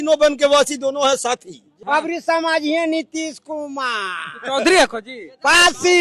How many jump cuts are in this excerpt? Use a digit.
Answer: 1